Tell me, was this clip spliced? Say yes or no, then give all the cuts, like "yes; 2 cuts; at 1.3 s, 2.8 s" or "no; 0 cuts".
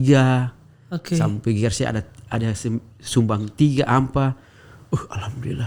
no; 0 cuts